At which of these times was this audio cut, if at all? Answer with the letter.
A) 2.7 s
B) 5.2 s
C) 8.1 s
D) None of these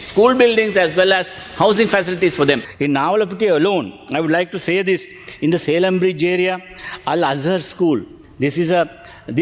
A